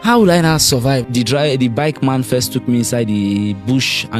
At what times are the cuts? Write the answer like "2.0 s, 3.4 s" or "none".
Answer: 1.1 s